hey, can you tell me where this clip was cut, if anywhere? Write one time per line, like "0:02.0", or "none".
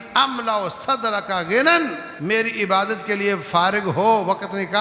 0:02.1